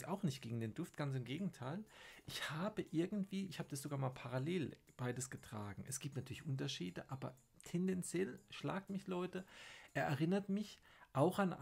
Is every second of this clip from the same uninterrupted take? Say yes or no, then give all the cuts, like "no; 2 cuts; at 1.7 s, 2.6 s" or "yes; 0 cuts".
yes; 0 cuts